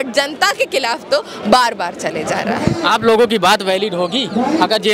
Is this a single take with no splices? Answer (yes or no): yes